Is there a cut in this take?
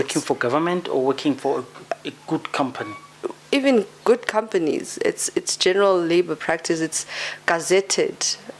no; 0 cuts

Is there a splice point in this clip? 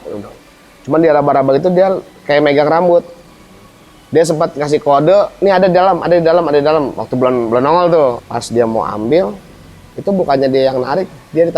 yes; 1 cut; at 8.2 s

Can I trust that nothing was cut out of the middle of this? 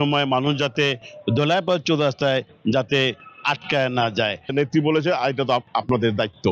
no; 1 cut; at 4.5 s

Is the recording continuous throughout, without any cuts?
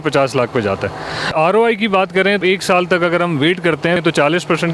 no; 3 cuts; at 1.3 s, 2.4 s, 4.0 s

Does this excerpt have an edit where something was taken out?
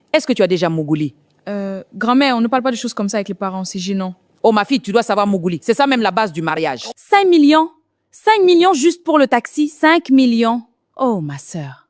yes; 1 cut; at 6.9 s

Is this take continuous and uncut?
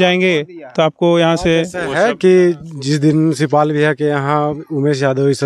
yes; 0 cuts

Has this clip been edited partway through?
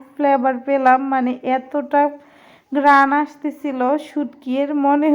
no; 0 cuts

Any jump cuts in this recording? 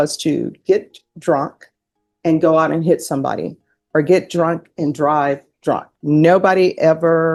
no; 0 cuts

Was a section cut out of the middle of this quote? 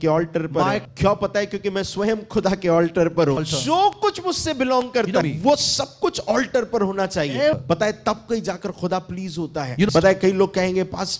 yes; 5 cuts; at 0.8 s, 3.4 s, 5.2 s, 7.6 s, 9.9 s

